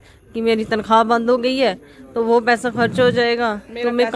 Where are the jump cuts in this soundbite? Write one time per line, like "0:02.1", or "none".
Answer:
none